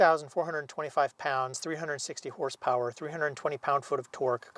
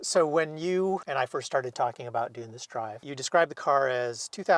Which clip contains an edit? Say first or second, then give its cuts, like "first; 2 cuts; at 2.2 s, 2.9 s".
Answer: second; 2 cuts; at 1.1 s, 3.1 s